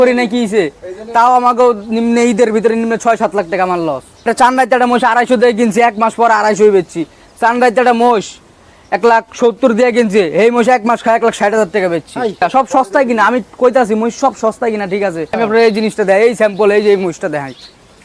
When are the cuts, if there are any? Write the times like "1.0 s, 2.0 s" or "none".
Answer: 4.3 s, 12.4 s, 15.3 s